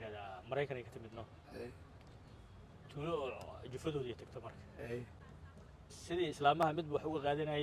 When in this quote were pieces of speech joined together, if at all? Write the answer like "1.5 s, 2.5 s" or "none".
none